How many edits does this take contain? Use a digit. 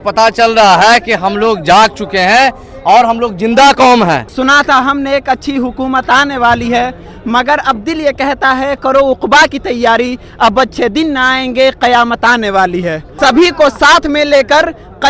2